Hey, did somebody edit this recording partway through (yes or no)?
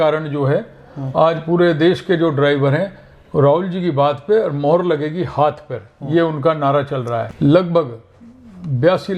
yes